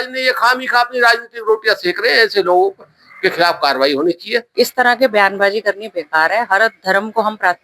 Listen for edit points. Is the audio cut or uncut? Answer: cut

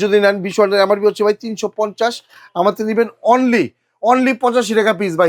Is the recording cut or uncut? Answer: uncut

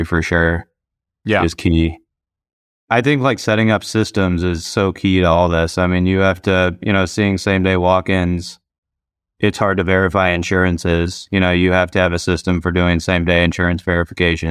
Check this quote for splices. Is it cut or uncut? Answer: cut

